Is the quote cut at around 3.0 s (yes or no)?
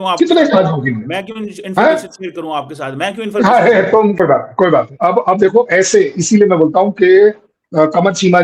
no